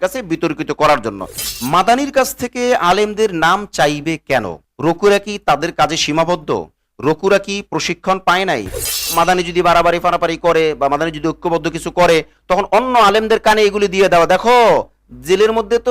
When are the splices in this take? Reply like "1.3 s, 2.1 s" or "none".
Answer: 1.5 s, 9.1 s